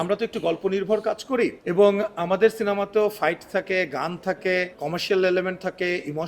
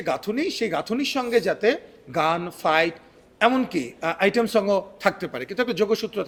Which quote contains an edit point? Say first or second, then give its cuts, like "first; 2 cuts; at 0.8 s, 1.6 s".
first; 2 cuts; at 1.6 s, 4.8 s